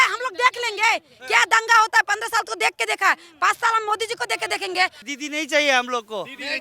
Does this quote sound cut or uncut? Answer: cut